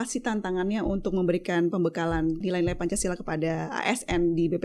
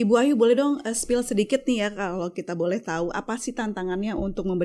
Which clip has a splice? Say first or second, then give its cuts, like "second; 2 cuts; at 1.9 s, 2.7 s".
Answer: first; 1 cut; at 2.4 s